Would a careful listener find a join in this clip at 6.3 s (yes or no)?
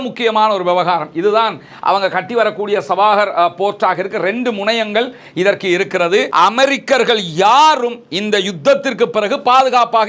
yes